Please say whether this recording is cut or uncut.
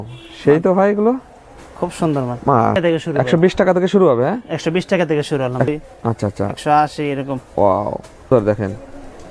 cut